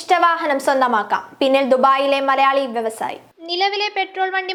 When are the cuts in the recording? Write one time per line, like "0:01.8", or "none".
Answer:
none